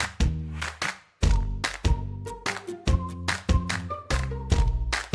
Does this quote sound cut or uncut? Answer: uncut